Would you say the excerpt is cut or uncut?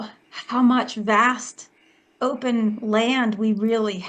uncut